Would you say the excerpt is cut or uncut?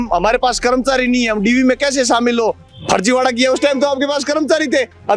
uncut